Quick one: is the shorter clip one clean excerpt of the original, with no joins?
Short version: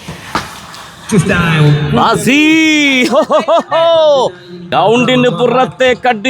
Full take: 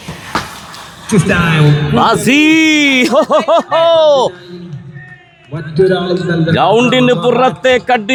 no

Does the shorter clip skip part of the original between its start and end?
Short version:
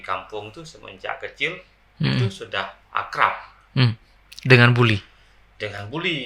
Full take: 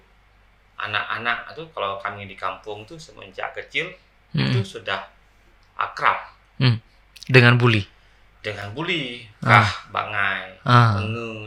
yes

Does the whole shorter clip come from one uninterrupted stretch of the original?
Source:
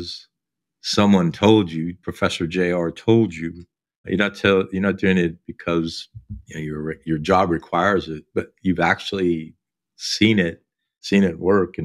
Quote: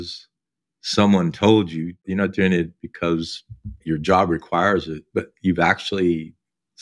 no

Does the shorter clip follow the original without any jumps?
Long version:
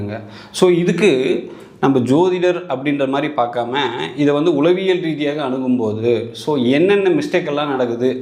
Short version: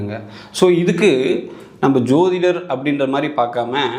yes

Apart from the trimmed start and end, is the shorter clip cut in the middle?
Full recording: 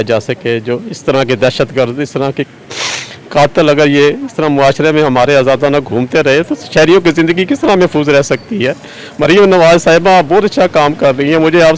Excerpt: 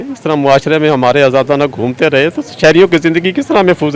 no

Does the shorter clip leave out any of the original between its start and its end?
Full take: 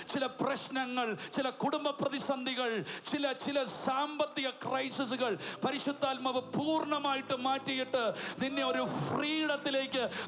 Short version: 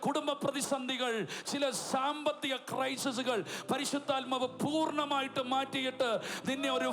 yes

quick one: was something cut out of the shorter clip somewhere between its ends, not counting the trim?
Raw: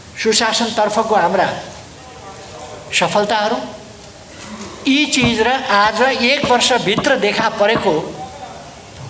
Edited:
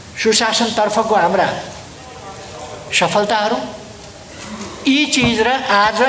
no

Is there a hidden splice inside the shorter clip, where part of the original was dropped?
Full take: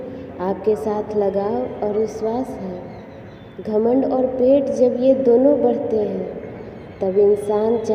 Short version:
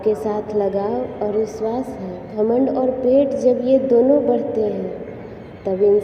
yes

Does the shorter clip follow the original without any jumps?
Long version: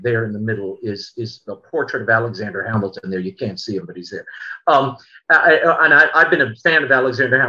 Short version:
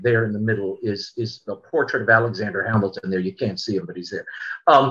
yes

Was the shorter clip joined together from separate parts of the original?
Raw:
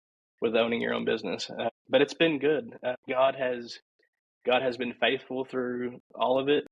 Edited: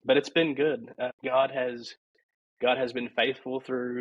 no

